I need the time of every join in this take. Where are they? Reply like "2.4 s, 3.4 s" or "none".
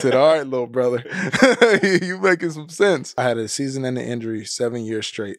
3.1 s